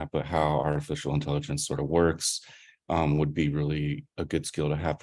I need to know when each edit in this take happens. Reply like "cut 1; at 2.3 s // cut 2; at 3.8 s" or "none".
none